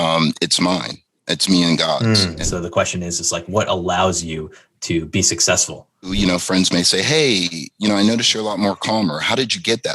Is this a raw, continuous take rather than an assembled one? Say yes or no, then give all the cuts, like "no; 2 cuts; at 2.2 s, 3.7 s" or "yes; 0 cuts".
no; 2 cuts; at 2.4 s, 6.1 s